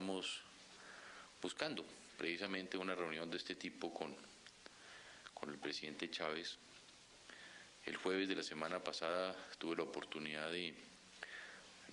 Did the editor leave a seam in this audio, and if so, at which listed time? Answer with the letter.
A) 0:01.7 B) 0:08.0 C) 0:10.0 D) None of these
A